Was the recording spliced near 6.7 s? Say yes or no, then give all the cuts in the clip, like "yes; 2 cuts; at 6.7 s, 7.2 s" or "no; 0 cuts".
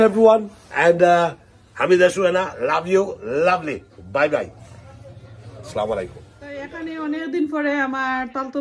yes; 1 cut; at 6.7 s